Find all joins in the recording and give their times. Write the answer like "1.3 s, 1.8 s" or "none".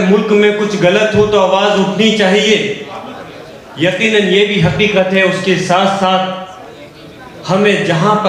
none